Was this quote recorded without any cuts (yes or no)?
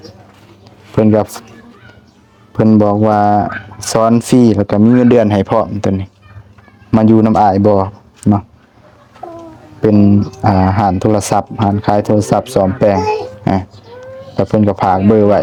yes